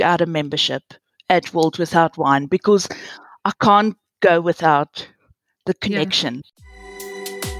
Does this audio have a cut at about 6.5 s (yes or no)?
yes